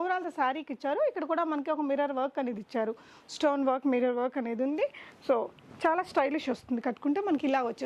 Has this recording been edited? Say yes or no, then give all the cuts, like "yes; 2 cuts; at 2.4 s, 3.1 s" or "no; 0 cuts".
no; 0 cuts